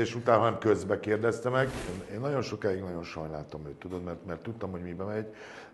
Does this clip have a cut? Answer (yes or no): yes